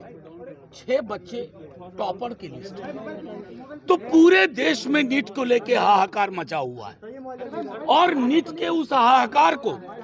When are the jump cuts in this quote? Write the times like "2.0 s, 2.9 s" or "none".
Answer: none